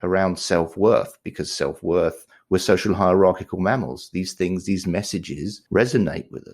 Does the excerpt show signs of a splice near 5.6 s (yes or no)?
yes